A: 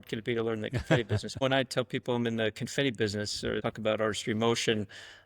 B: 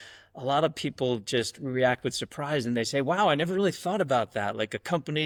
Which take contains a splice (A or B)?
A